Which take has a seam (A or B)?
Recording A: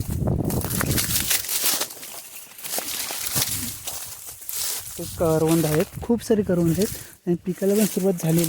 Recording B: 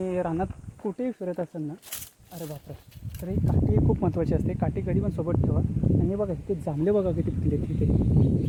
A